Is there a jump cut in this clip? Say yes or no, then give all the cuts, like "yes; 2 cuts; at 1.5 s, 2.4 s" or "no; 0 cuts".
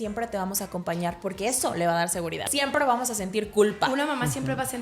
yes; 1 cut; at 2.4 s